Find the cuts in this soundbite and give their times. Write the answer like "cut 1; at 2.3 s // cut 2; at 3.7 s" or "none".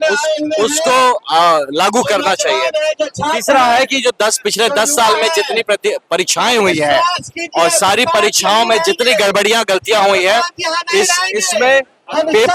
none